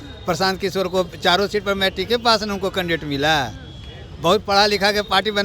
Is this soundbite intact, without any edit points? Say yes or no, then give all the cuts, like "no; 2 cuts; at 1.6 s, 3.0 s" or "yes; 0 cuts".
yes; 0 cuts